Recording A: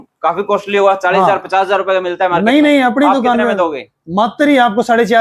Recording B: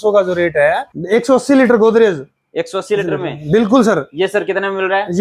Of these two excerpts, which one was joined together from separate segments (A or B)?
B